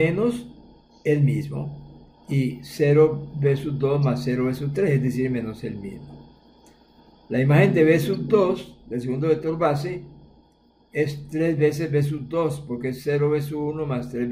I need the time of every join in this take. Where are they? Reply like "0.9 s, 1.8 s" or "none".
none

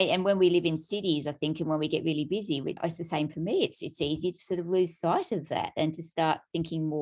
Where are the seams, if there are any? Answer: 2.8 s

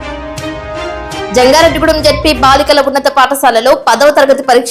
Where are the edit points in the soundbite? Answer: 1.3 s

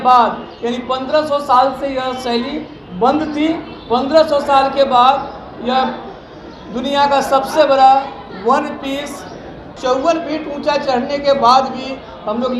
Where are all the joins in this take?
9.7 s

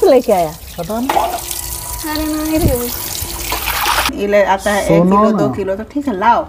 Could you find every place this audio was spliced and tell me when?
4.1 s

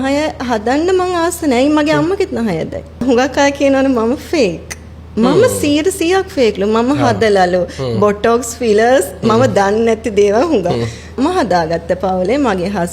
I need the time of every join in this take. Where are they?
3.0 s, 11.2 s

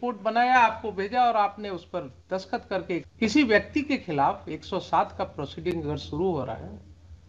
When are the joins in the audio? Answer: 3.1 s

